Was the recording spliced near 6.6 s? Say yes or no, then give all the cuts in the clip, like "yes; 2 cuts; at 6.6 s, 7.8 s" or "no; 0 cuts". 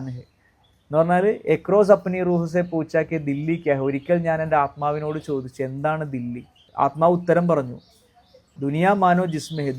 yes; 2 cuts; at 6.6 s, 8.5 s